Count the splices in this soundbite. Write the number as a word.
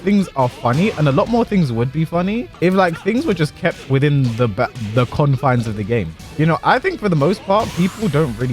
two